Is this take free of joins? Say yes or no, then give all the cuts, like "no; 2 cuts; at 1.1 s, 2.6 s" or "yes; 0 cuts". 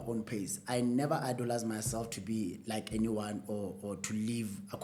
yes; 0 cuts